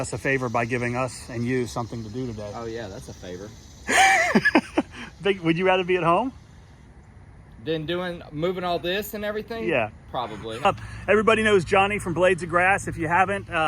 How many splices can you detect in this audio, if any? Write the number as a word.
one